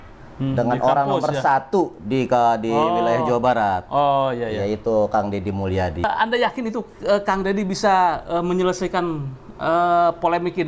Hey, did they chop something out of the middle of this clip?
yes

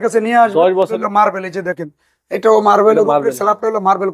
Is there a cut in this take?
yes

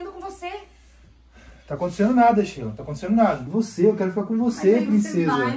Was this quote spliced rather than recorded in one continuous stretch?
yes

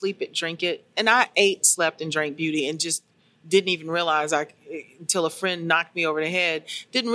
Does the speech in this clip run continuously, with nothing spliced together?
yes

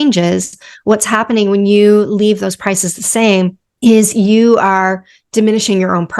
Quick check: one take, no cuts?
no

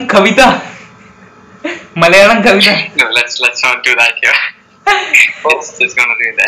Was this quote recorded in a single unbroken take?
yes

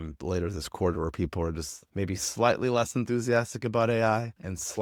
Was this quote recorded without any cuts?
yes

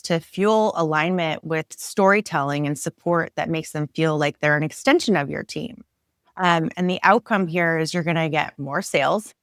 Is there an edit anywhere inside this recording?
no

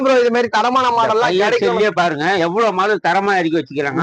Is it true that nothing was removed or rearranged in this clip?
yes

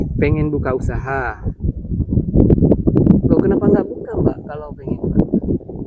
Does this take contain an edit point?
no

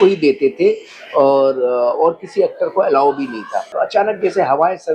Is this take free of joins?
no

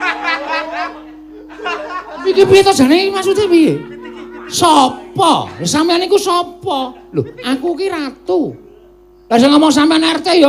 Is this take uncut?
yes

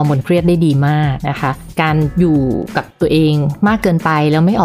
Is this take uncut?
no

